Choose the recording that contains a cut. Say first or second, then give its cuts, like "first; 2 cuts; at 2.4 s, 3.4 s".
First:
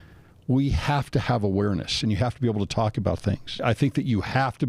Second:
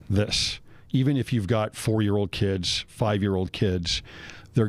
first; 2 cuts; at 2.0 s, 3.6 s